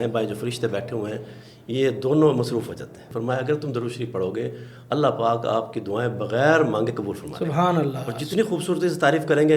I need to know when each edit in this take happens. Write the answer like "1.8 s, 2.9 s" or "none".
3.1 s, 8.1 s